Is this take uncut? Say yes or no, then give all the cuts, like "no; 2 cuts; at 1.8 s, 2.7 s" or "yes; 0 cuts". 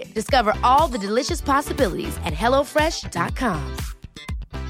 yes; 0 cuts